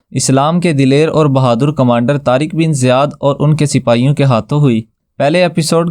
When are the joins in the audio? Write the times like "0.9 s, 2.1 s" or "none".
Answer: 5.0 s